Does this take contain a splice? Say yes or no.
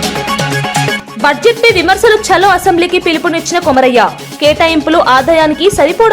yes